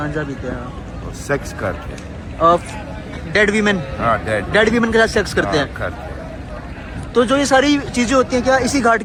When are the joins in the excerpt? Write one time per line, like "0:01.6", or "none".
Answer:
none